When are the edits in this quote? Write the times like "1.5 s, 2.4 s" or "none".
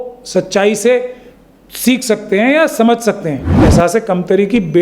3.6 s